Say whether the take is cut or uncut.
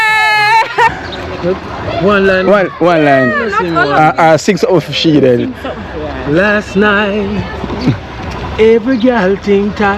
cut